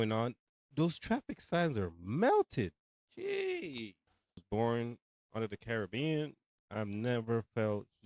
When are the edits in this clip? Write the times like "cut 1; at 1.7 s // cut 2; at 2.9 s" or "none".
cut 1; at 4.4 s